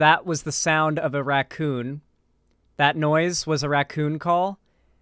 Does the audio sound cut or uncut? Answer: uncut